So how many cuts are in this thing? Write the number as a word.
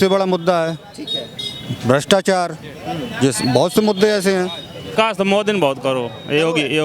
one